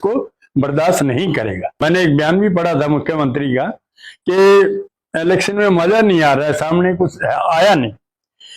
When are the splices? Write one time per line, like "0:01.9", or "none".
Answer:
0:01.8